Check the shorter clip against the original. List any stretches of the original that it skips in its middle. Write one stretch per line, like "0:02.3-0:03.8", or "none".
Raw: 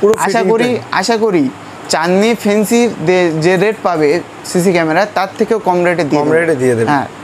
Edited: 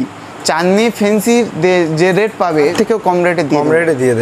0:04.2-0:05.3

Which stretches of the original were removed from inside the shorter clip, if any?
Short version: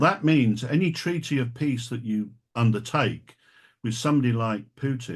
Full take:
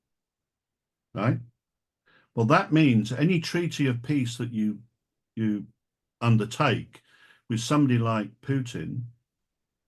0:04.9-0:06.1

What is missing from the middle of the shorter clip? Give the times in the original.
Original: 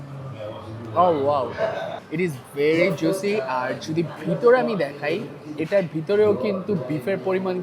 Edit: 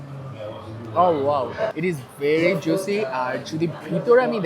0:01.7-0:02.1

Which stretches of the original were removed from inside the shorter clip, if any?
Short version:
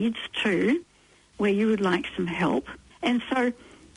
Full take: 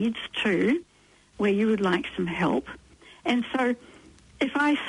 0:02.8-0:03.0

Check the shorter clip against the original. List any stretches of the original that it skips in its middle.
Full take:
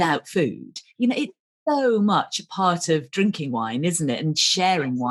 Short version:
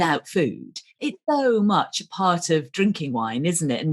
0:00.9-0:01.3

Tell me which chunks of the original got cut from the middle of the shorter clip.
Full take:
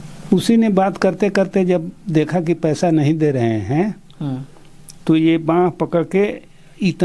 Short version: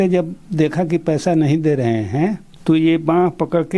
0:04.0-0:04.9

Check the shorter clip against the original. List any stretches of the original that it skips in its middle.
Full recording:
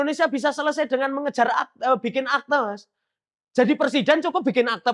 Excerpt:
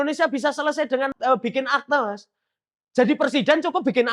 0:01.1-0:01.7

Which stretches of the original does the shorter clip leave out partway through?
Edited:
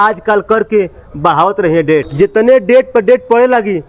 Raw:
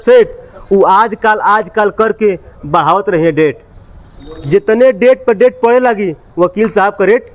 0:03.6-0:04.4

